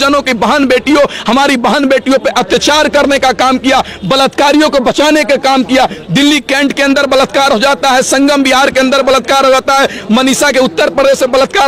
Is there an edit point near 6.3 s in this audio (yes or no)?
no